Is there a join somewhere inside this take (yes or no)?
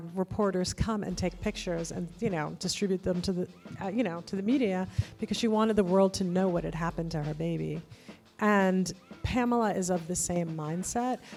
no